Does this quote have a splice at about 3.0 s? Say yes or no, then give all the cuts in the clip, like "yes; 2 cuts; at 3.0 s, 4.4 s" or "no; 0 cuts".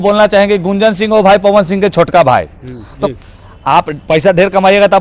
yes; 1 cut; at 3.0 s